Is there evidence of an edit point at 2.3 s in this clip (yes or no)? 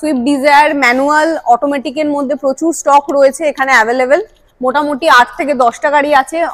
no